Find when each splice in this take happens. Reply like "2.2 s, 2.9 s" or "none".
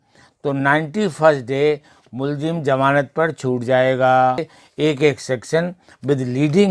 4.6 s